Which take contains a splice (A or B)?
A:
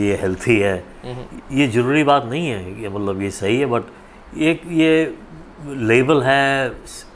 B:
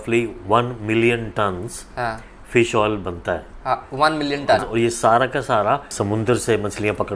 B